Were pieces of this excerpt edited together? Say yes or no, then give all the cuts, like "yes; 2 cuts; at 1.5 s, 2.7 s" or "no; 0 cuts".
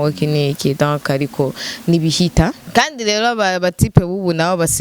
yes; 1 cut; at 2.6 s